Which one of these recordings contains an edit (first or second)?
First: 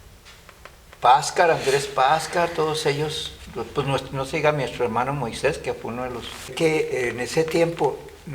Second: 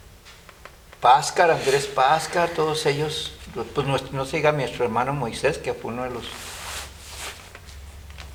first